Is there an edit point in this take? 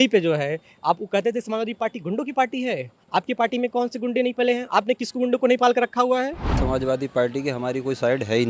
yes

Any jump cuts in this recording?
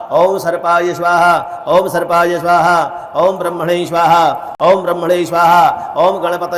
no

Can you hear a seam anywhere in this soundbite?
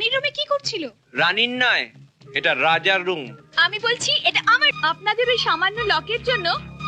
yes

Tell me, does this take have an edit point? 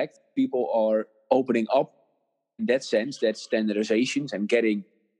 yes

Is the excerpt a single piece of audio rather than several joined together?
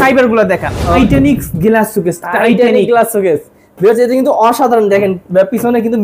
no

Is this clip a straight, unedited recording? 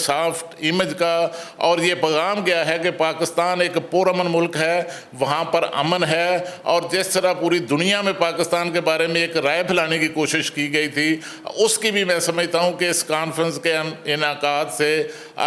yes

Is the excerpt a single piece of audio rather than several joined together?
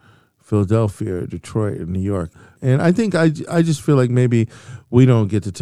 no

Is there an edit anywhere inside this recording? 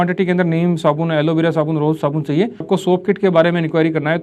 yes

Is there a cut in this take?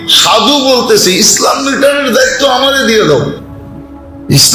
no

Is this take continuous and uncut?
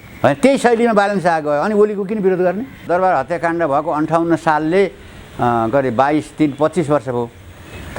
no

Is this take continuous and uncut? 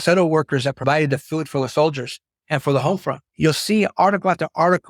yes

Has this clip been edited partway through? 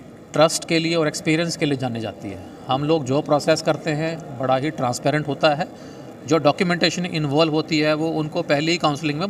no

